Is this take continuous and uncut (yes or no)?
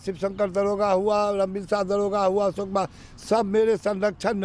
yes